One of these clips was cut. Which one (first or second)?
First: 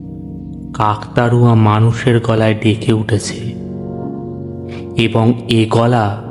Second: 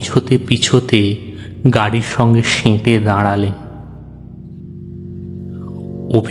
first